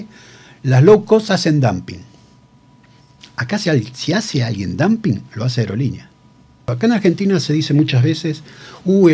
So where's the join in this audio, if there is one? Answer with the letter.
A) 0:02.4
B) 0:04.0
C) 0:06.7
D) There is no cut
C